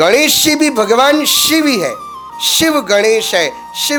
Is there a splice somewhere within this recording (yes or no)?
no